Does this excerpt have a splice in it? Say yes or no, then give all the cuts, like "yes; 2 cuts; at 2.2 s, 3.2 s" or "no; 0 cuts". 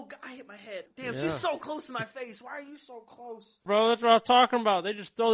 yes; 2 cuts; at 0.9 s, 3.6 s